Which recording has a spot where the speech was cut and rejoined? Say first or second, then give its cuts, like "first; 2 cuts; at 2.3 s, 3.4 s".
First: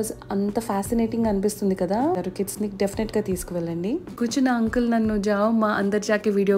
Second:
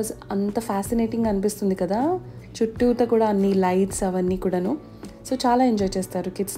first; 2 cuts; at 2.2 s, 4.2 s